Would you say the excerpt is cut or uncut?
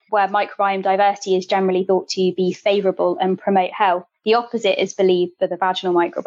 uncut